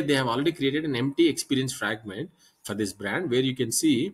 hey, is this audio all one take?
yes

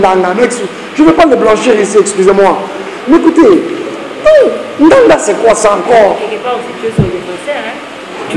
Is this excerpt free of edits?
yes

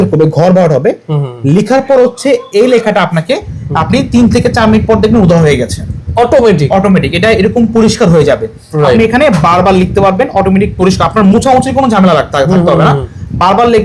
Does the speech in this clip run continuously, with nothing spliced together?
yes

